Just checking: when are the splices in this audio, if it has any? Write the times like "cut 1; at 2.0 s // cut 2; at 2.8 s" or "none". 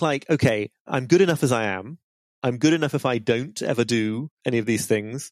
cut 1; at 0.8 s // cut 2; at 4.3 s